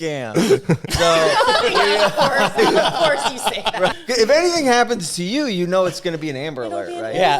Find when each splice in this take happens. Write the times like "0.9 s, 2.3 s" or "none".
3.9 s